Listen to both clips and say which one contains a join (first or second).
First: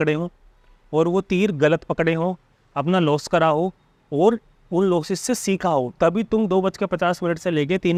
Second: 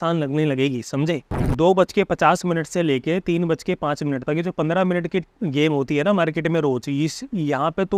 second